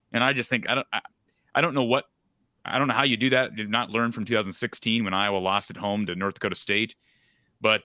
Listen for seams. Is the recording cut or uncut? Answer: uncut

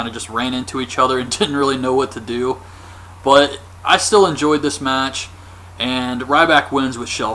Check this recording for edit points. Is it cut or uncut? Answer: uncut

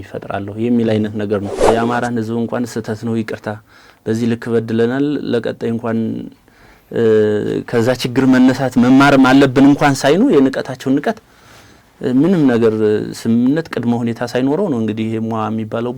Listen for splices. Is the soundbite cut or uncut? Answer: cut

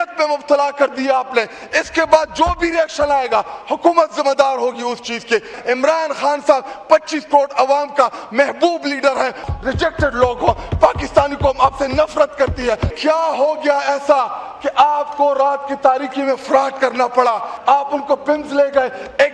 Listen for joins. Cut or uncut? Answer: cut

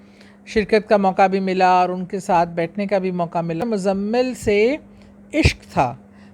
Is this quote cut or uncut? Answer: cut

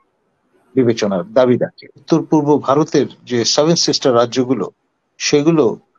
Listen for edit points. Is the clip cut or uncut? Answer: cut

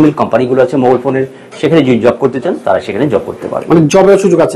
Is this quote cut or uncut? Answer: uncut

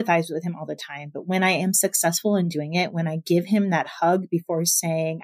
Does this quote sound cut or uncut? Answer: uncut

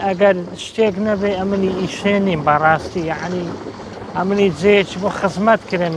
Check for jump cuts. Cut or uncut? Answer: uncut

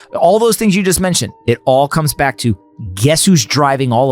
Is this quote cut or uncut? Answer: cut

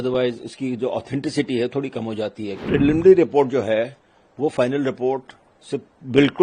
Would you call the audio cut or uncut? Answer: cut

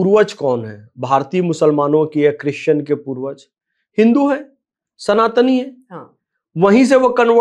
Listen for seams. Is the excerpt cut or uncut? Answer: uncut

